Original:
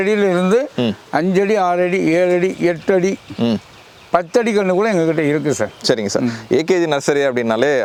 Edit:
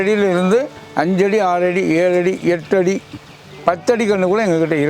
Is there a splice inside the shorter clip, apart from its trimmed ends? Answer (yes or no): yes